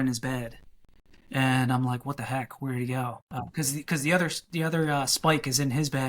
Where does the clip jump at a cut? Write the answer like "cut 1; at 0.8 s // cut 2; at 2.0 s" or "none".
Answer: cut 1; at 3.3 s